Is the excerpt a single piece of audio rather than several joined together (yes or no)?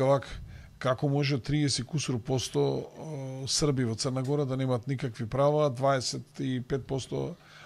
yes